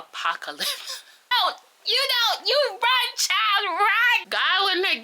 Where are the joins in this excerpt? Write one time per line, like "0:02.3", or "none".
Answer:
0:01.3
0:04.2

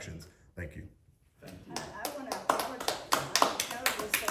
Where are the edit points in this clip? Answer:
none

